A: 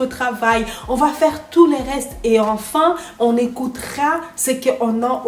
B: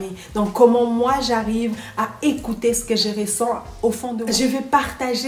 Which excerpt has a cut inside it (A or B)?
B